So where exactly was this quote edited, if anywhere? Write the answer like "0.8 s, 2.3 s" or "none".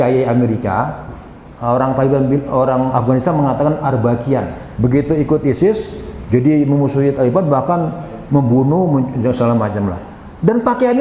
4.6 s

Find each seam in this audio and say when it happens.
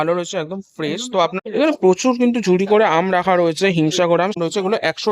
1.3 s, 4.4 s

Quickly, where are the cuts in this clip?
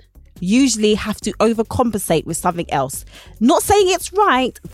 none

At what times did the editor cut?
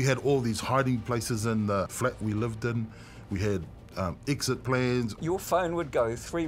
1.9 s, 5.2 s

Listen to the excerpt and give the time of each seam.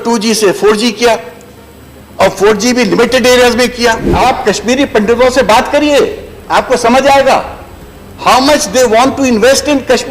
4.1 s

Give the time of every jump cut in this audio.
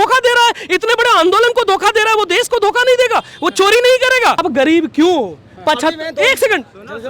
4.4 s

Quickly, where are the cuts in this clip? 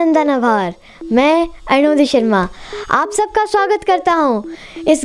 none

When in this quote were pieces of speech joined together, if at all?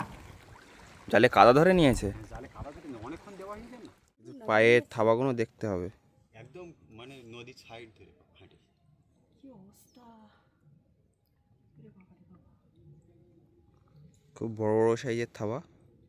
4.4 s

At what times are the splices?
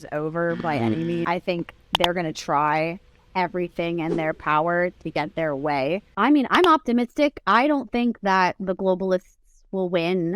1.2 s, 6.1 s

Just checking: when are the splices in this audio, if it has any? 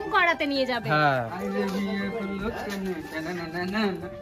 1.3 s

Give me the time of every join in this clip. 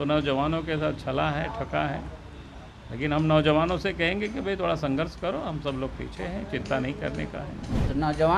none

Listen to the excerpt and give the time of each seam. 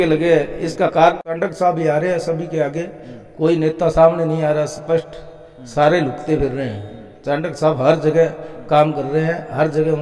1.3 s

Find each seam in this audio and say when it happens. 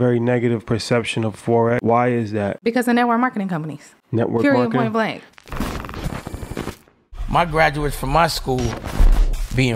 1.8 s, 2.6 s, 5.3 s

